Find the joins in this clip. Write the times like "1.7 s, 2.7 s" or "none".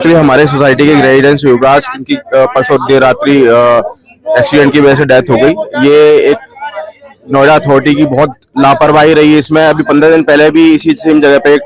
none